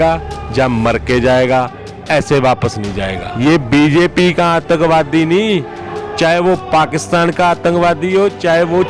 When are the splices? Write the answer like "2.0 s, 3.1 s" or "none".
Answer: 3.2 s